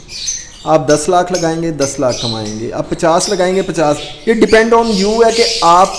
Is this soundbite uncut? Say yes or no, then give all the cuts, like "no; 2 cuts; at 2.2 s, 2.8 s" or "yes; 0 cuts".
yes; 0 cuts